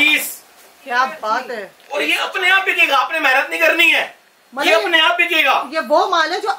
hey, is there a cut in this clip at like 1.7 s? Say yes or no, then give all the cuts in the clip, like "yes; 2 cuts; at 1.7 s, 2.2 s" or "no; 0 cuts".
yes; 1 cut; at 1.7 s